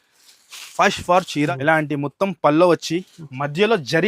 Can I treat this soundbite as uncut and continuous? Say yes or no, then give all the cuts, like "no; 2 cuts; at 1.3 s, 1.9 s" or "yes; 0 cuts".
no; 1 cut; at 1.5 s